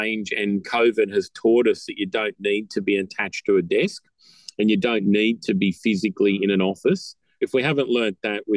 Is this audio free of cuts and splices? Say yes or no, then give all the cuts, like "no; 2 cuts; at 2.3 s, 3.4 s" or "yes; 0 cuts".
no; 1 cut; at 7.4 s